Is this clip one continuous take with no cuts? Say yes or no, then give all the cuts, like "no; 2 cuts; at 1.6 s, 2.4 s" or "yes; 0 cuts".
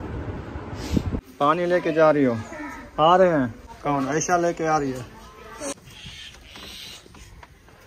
no; 3 cuts; at 1.3 s, 3.7 s, 5.7 s